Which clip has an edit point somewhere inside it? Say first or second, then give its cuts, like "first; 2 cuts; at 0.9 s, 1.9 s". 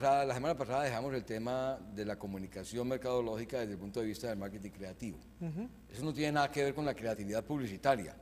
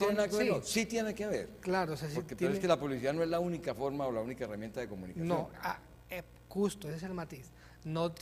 first; 1 cut; at 4.2 s